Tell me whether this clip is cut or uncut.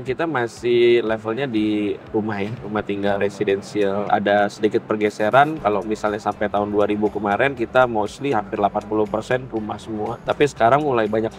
uncut